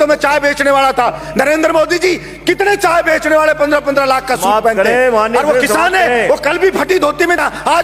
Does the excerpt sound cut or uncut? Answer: cut